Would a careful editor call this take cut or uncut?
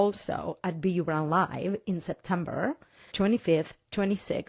cut